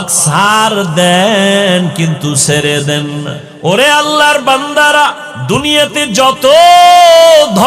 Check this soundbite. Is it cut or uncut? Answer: cut